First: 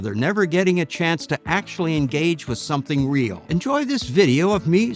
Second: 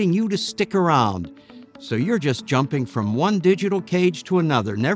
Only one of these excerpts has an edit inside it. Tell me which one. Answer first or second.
first